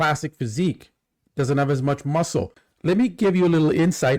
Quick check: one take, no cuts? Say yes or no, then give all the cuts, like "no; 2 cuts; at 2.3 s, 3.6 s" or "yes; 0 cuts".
no; 1 cut; at 2.7 s